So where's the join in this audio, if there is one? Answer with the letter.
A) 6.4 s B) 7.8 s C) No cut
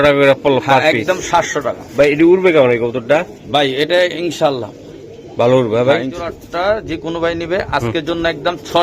A